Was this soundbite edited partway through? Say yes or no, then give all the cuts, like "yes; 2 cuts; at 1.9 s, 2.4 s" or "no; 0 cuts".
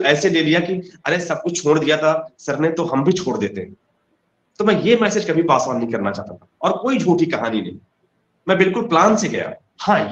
no; 0 cuts